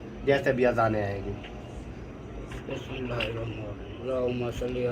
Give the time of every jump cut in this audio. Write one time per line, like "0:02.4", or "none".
0:03.9